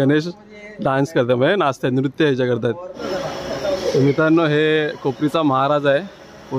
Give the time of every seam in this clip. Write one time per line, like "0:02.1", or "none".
0:02.9